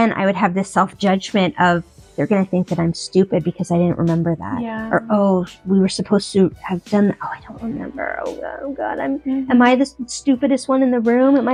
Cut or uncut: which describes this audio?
uncut